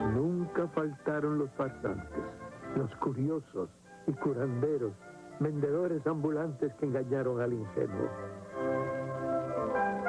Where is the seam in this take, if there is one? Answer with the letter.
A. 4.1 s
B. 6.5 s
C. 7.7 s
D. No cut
D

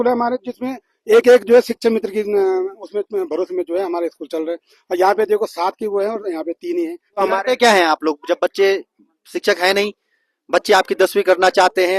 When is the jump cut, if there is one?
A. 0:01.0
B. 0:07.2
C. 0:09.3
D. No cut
B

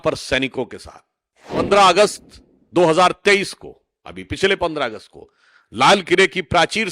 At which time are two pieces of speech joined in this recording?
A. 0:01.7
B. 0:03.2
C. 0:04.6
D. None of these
A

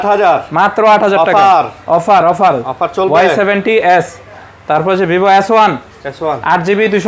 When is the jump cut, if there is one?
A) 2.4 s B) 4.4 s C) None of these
C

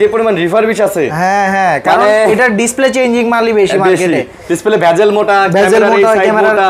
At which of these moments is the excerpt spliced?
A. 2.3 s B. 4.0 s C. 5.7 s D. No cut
D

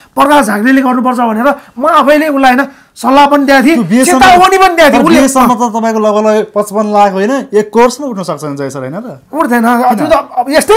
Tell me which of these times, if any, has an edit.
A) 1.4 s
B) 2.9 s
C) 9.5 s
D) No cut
D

